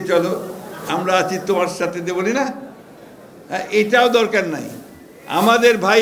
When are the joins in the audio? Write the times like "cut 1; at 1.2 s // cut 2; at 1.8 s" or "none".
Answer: none